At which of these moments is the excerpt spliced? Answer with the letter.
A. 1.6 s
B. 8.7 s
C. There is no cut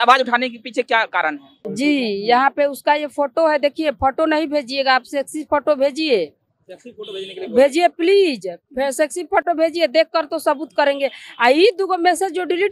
A